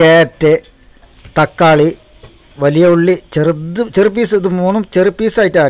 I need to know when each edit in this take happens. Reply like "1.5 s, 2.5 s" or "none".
1.1 s, 2.5 s